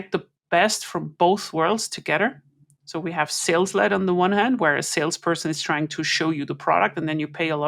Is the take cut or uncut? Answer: uncut